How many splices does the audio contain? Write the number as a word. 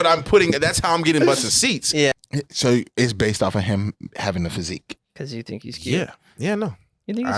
one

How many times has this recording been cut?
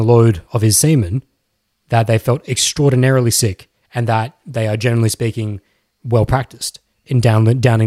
zero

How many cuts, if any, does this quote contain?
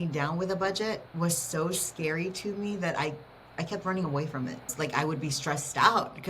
two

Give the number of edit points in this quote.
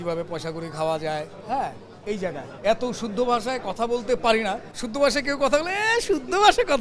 two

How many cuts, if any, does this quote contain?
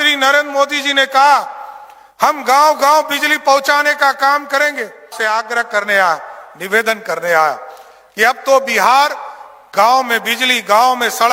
one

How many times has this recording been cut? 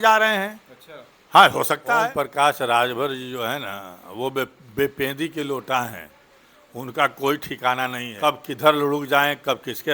two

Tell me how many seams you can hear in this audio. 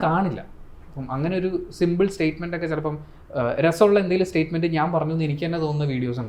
zero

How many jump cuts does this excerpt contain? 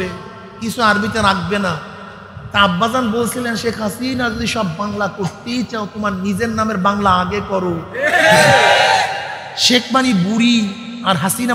zero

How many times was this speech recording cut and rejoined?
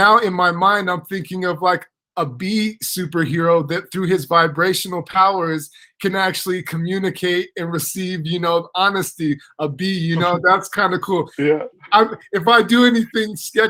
zero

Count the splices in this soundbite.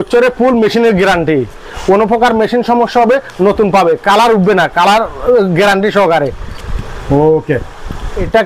zero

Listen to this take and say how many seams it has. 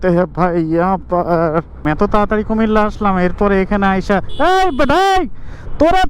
one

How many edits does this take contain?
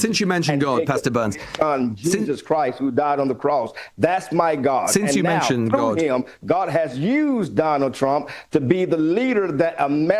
zero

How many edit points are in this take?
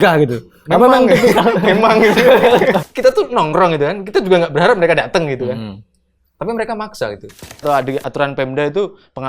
two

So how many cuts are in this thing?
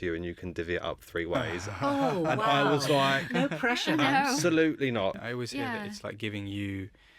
one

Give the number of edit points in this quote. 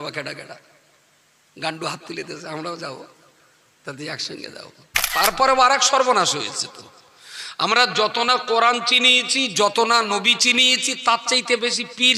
one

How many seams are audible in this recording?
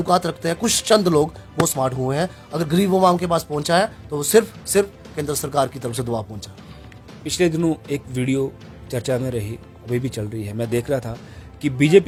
zero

